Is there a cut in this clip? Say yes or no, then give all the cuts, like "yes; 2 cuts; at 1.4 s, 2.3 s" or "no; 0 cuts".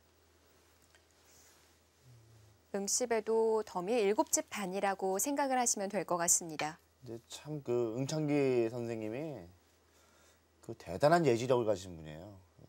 yes; 1 cut; at 2.9 s